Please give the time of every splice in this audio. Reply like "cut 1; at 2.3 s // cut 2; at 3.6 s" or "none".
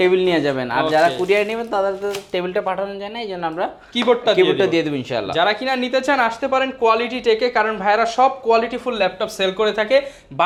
none